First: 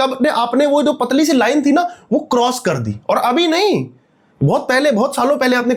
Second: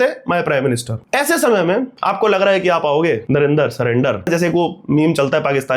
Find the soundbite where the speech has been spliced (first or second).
second